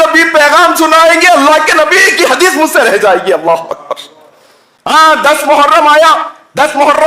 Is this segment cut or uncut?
cut